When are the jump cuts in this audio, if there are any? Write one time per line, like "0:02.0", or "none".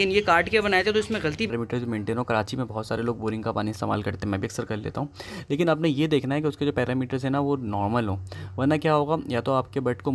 0:01.5

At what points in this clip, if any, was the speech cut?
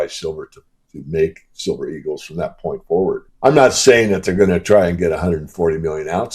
0:03.3

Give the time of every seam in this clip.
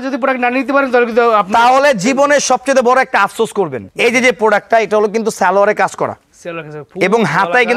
none

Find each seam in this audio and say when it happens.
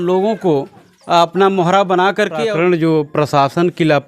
0:02.5

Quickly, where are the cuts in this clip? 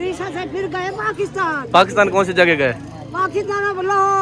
0:01.7

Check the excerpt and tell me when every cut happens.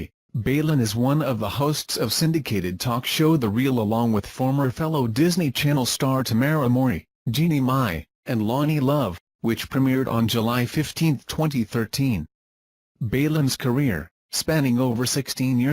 0:12.6

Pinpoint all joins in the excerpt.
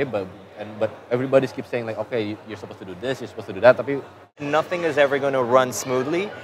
0:04.4

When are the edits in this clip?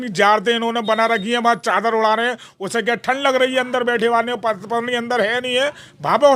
none

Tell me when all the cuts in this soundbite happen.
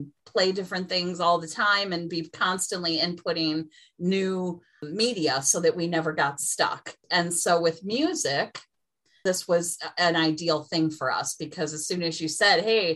0:04.9
0:07.0
0:09.2

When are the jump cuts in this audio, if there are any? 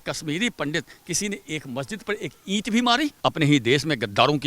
0:03.1

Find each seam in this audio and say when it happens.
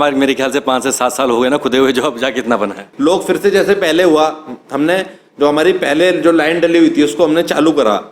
0:02.9

